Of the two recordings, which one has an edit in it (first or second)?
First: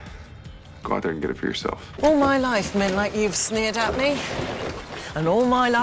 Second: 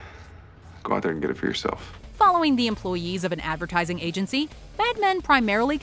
first